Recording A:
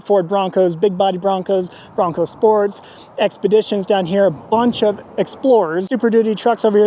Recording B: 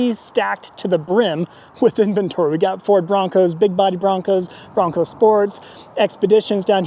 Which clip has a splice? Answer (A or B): A